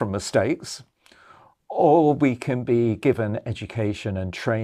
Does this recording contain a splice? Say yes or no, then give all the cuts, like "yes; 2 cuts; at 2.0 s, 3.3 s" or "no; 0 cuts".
no; 0 cuts